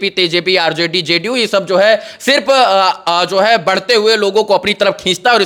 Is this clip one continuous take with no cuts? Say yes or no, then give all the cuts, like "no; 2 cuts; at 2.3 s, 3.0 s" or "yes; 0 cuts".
yes; 0 cuts